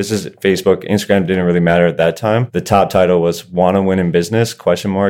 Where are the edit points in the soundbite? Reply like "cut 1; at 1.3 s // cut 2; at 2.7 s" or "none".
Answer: cut 1; at 2.5 s